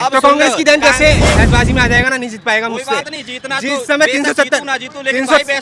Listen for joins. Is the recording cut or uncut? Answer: cut